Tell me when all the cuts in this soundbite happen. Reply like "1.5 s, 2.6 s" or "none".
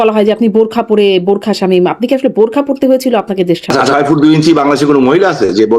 3.8 s